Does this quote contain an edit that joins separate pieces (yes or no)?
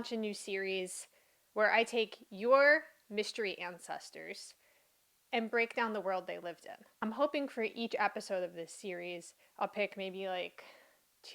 yes